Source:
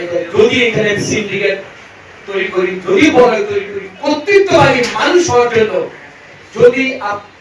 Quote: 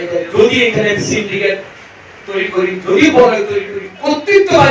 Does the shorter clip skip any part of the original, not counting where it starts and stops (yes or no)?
no